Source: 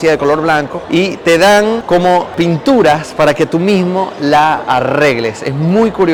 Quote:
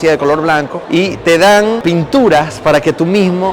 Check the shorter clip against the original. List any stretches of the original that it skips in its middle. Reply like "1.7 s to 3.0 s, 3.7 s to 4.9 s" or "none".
1.8 s to 2.3 s